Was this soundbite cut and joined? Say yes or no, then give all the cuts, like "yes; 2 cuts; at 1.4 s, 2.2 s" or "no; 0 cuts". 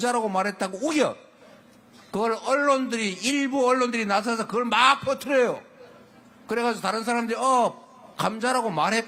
no; 0 cuts